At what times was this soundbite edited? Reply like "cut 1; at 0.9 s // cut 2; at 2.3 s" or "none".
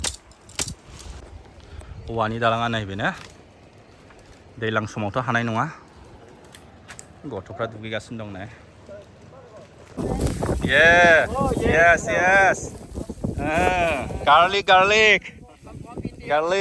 cut 1; at 1.2 s // cut 2; at 10.0 s